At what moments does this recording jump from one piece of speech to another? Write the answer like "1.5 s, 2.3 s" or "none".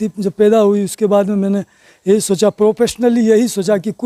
none

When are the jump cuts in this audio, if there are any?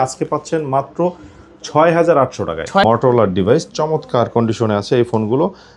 2.8 s

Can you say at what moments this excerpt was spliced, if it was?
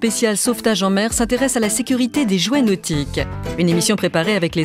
none

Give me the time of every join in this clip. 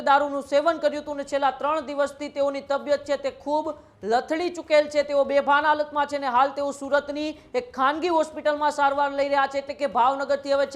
none

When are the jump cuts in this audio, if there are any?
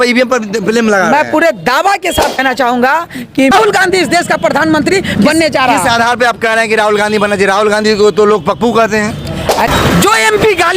2.3 s, 3.5 s, 9.7 s

